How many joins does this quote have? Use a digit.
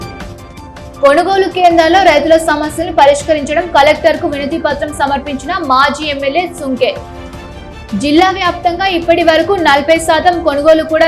1